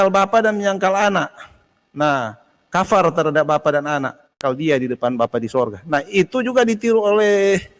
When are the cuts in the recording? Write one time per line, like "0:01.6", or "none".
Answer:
0:04.4